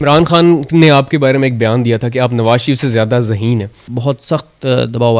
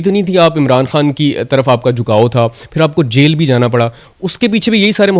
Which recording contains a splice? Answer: first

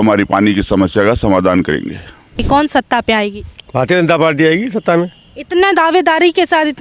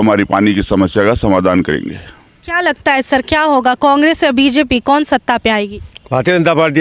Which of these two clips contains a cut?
first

